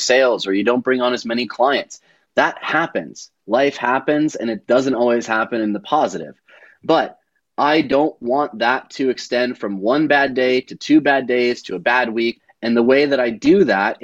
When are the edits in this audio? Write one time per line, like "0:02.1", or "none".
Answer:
0:12.5